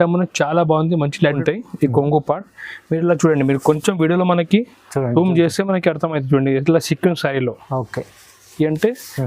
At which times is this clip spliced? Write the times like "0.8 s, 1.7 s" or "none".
1.4 s